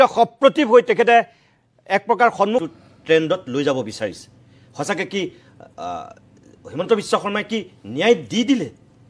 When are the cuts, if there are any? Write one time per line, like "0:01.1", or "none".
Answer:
0:02.6